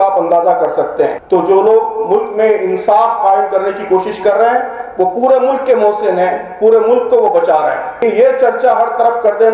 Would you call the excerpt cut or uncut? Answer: cut